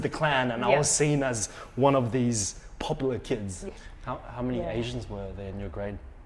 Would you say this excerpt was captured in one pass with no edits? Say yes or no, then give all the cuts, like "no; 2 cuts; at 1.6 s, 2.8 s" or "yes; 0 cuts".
no; 1 cut; at 3.6 s